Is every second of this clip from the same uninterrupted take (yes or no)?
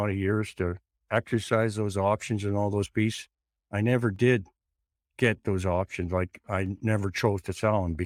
yes